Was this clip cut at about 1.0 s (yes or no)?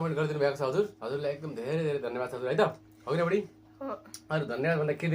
yes